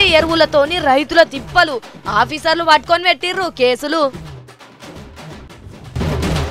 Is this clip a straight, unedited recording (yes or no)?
yes